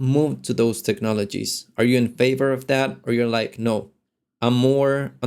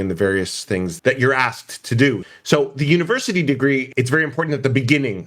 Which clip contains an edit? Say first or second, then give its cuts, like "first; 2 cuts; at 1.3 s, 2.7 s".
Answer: second; 3 cuts; at 0.9 s, 2.2 s, 3.9 s